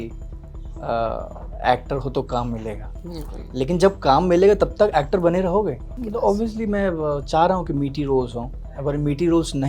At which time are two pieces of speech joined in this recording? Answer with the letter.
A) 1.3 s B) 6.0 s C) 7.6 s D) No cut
B